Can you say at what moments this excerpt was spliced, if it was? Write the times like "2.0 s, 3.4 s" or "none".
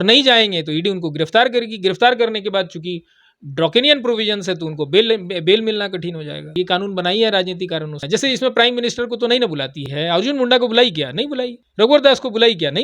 6.5 s, 8.0 s, 9.8 s, 11.6 s